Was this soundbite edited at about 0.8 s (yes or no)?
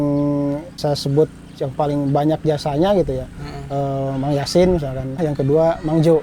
yes